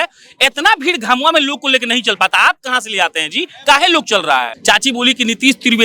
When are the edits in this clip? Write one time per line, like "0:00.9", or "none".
0:04.5